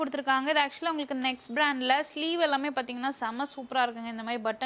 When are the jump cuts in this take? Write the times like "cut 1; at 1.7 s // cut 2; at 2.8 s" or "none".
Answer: none